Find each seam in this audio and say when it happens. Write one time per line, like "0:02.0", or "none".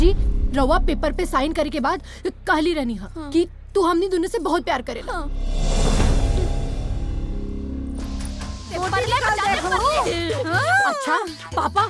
0:08.7

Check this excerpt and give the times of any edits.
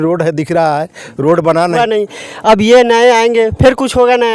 0:01.8

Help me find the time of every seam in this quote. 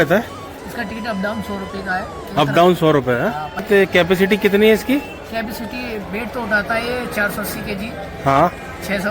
0:03.6

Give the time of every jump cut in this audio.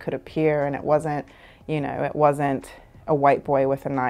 none

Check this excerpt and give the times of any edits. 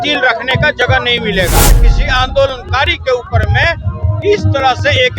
0:01.8

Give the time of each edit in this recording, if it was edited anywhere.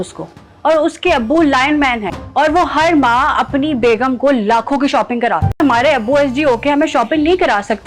0:02.1
0:05.6

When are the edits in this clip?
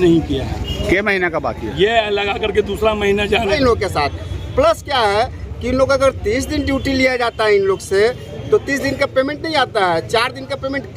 0:03.5

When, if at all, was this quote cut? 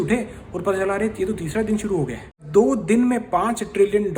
0:02.4

